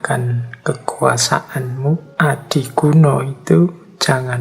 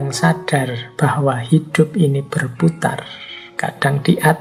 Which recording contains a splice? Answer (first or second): first